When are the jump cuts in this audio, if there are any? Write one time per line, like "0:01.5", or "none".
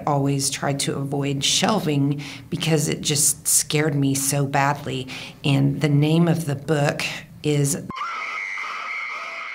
0:07.9

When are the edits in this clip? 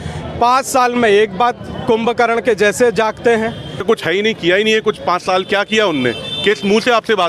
0:03.7

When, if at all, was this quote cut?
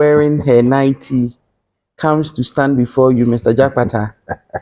none

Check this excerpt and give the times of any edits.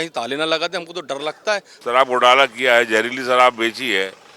0:01.7

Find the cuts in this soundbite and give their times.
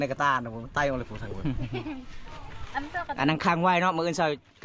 none

